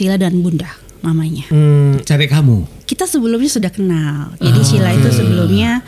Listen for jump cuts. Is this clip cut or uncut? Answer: cut